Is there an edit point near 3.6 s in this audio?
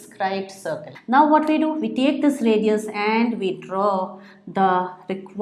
no; 1 cut; at 0.9 s

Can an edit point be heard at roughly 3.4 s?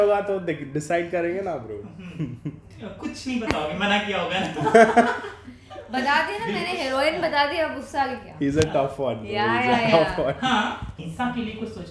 no; 1 cut; at 10.9 s

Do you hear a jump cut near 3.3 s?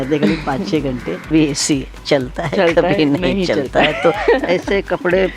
no; 1 cut; at 1.3 s

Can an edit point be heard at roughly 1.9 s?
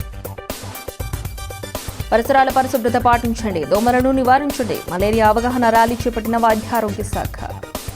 yes; 1 cut; at 1.9 s

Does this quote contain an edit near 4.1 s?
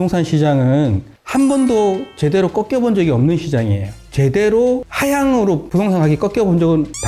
yes; 1 cut; at 4.1 s

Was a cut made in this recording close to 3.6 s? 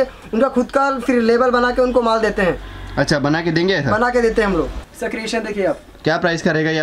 no; 1 cut; at 4.8 s

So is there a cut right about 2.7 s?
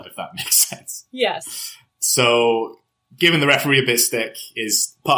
no; 0 cuts

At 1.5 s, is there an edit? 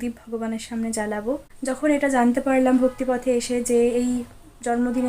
yes; 1 cut; at 1.5 s

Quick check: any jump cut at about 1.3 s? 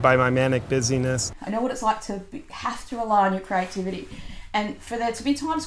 yes; 1 cut; at 1.3 s

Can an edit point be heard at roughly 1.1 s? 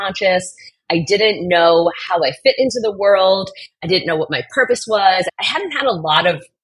no; 1 cut; at 5.3 s

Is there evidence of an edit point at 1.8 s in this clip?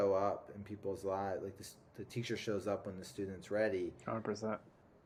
no; 0 cuts

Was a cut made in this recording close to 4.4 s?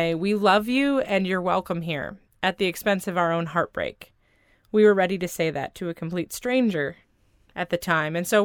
no; 0 cuts

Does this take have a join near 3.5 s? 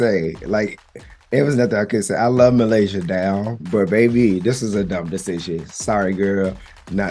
yes; 1 cut; at 3.5 s

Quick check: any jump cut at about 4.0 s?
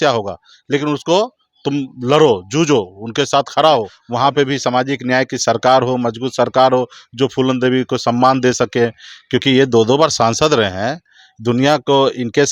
yes; 1 cut; at 4.0 s

